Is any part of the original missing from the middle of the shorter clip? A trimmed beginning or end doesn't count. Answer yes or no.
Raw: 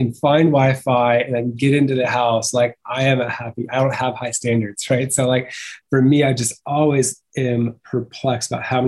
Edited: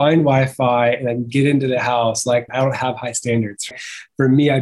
yes